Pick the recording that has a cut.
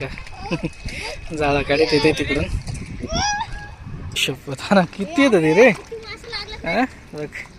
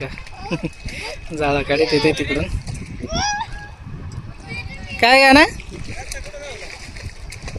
first; 1 cut; at 4.2 s

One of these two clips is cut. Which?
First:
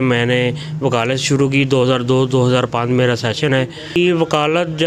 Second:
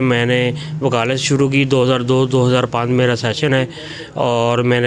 first; 1 cut; at 4.0 s

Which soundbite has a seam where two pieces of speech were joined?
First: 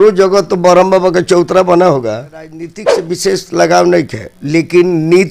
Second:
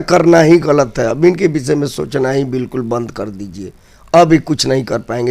first; 1 cut; at 2.9 s

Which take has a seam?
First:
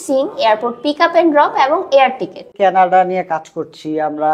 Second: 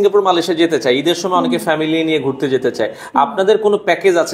first; 1 cut; at 2.5 s

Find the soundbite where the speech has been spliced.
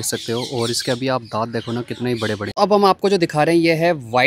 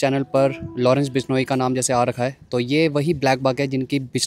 first; 1 cut; at 2.5 s

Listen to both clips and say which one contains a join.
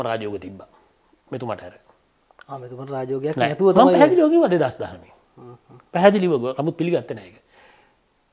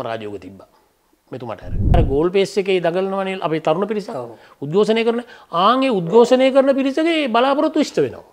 second; 1 cut; at 1.9 s

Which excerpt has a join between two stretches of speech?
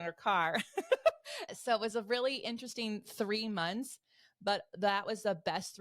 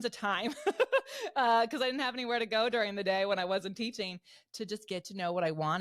first; 1 cut; at 1.5 s

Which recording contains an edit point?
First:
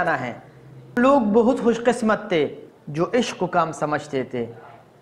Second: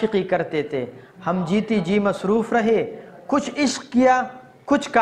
first; 1 cut; at 1.0 s

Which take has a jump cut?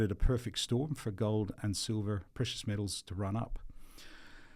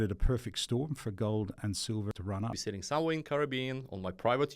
second; 1 cut; at 2.6 s

